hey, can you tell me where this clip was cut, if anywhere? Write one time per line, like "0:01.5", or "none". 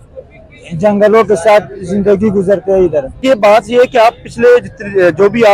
0:03.2